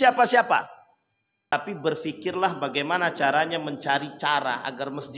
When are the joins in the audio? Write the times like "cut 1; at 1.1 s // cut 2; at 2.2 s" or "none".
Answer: cut 1; at 1.6 s